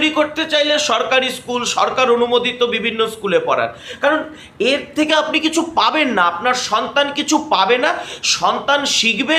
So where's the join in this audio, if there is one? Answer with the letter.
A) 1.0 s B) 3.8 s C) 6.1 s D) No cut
D